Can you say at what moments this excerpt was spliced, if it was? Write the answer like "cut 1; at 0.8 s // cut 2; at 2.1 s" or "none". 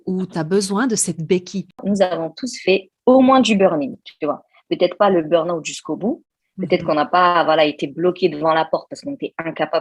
cut 1; at 1.8 s